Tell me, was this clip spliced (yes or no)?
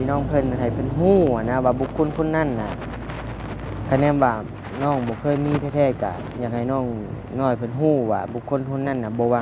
no